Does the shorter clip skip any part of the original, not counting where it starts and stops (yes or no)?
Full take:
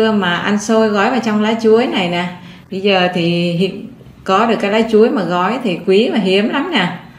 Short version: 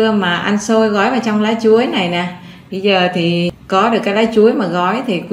yes